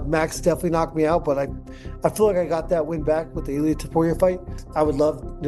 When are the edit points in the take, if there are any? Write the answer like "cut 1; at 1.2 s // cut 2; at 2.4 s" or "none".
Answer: cut 1; at 4.6 s